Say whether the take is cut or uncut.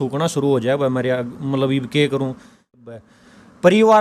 cut